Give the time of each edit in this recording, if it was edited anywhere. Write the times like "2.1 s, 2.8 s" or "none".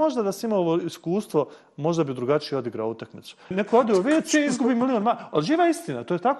3.5 s